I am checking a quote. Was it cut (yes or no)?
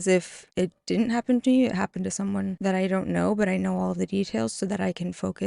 yes